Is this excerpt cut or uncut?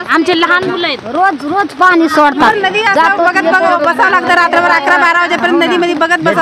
cut